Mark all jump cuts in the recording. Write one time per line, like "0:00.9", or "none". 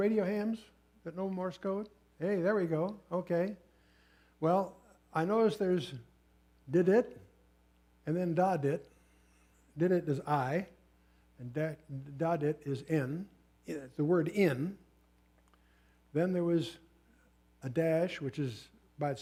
none